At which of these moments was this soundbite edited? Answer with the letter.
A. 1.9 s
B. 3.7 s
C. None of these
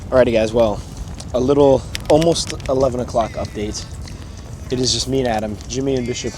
A